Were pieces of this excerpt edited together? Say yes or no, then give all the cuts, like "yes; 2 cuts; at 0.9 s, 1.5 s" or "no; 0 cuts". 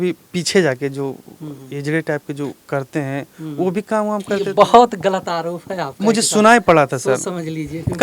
no; 0 cuts